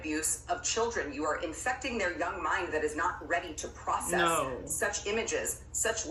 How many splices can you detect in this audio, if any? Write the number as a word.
zero